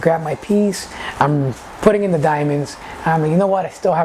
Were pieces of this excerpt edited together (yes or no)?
no